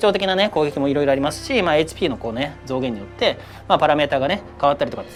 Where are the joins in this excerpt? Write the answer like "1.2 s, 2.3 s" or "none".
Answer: none

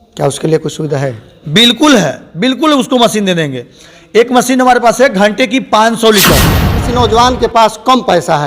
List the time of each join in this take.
6.8 s

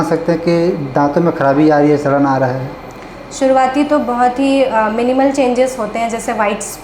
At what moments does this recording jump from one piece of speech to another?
none

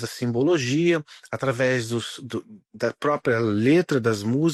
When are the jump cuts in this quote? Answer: none

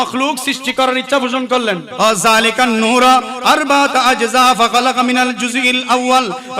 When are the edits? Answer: 1.9 s

